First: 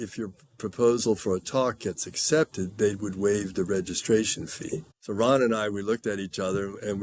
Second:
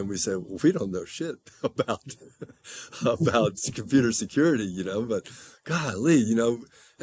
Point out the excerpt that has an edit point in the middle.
first; 1 cut; at 4.9 s

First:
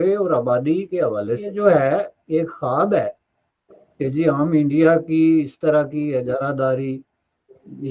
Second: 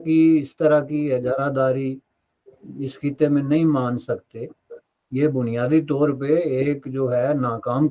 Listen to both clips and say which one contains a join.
first; 1 cut; at 1.5 s

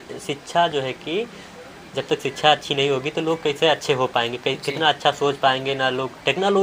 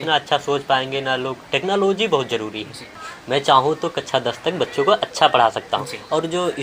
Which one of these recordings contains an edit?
second; 1 cut; at 3.0 s

